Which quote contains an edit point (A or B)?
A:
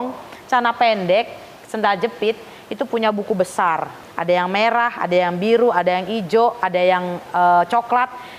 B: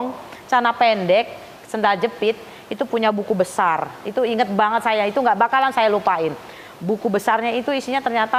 A